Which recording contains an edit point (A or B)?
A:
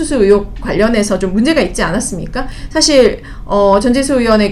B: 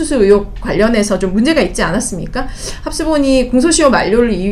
A